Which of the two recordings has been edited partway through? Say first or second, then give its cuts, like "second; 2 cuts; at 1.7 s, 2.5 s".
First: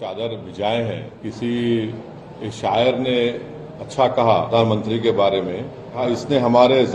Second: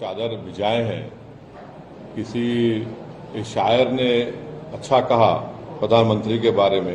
first; 3 cuts; at 1.1 s, 4.5 s, 6.0 s